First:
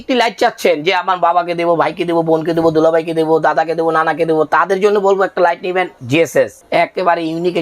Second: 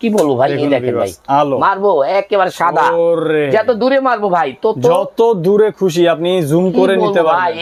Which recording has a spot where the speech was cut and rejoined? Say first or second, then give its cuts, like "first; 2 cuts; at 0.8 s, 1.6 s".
first; 1 cut; at 6.2 s